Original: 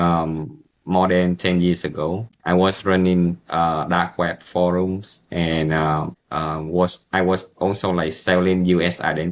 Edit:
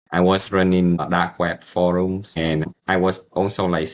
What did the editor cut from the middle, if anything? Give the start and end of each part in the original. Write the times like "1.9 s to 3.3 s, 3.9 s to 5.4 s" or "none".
3.4 s to 3.8 s, 5.4 s to 6.9 s

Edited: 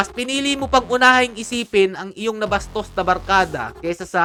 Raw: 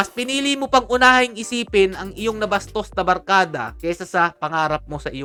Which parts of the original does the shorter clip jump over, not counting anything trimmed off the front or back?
none

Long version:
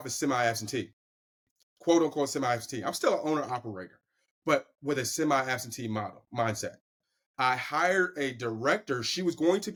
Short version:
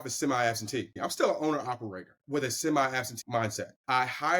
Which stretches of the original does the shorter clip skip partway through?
1.0 s to 2.8 s, 4.0 s to 4.7 s, 5.8 s to 6.7 s

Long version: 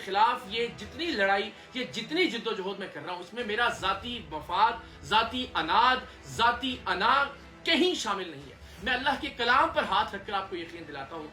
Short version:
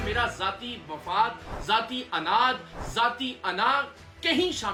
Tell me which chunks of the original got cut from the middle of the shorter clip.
none

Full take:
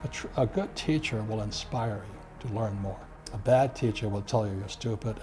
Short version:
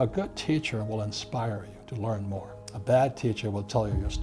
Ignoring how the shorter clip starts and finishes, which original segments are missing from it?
2.5 s to 2.7 s

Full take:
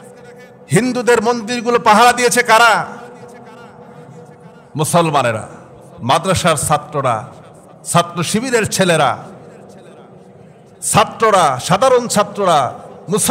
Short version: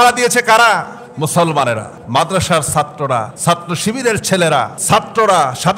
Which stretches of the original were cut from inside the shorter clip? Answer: 3.0 s to 4.6 s, 5.5 s to 5.9 s, 7.3 s to 7.8 s, 9.2 s to 10.8 s

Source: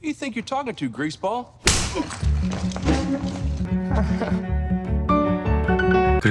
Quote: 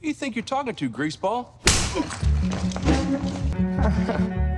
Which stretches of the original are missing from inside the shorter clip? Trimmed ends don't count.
3.5 s to 3.6 s

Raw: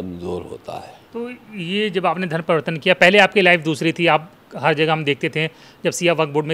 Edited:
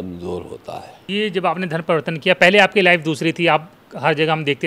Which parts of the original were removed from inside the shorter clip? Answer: 1.1 s to 1.7 s

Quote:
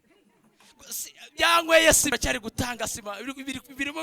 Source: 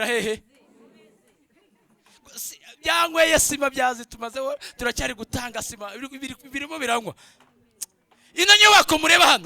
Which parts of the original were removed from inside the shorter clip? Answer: 3.6 s to 4.9 s

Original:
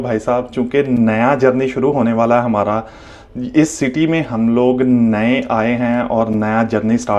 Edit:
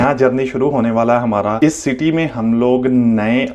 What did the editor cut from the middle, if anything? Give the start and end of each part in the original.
2.8 s to 3.5 s

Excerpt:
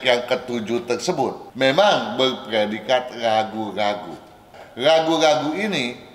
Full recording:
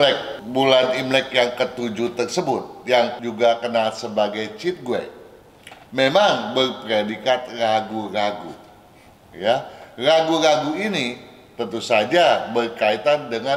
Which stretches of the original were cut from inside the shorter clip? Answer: 2.7 s to 5.8 s, 9.0 s to 9.8 s

